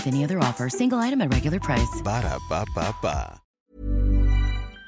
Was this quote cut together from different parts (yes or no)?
yes